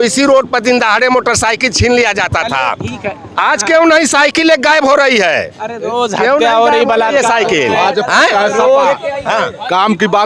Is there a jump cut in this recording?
no; 0 cuts

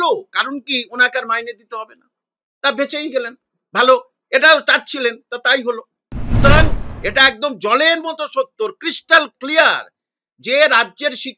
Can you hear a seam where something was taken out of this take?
yes; 1 cut; at 6.4 s

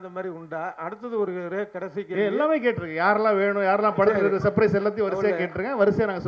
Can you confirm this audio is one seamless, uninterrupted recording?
yes; 0 cuts

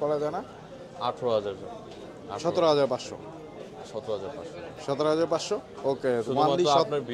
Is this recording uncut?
yes; 0 cuts

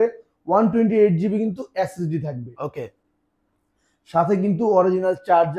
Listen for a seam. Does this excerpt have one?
no; 0 cuts

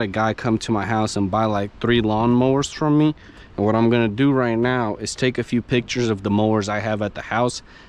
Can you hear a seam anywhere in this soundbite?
no; 0 cuts

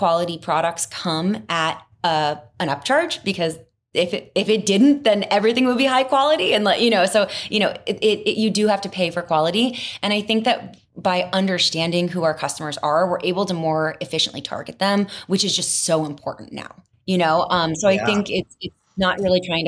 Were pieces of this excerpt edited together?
no; 0 cuts

